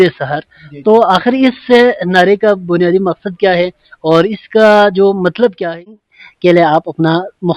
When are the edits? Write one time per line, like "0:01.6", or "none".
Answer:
0:06.3